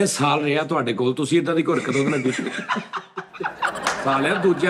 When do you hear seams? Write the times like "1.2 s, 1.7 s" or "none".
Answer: none